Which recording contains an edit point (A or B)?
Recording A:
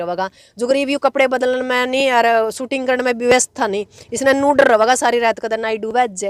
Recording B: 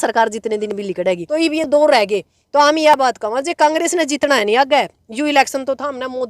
B